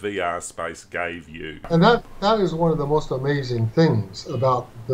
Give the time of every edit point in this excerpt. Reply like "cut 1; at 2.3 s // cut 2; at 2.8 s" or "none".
cut 1; at 1.6 s